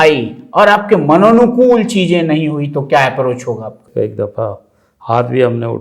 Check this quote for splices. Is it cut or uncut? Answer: cut